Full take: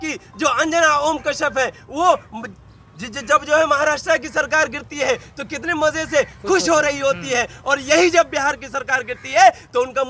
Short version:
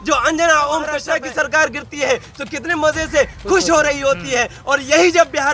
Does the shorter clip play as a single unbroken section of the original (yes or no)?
no